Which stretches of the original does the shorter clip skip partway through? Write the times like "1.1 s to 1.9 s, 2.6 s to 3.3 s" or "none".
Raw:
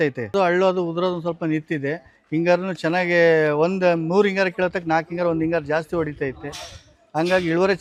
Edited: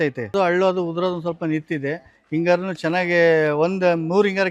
none